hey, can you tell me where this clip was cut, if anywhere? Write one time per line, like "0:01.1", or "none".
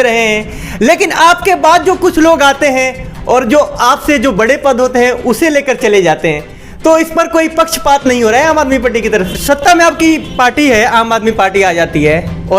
0:09.3